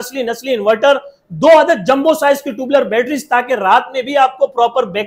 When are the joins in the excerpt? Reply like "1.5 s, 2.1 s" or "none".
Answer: none